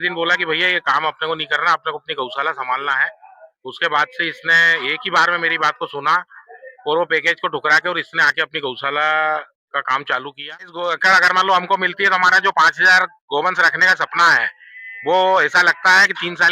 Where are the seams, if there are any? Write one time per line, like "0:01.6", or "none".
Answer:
0:10.7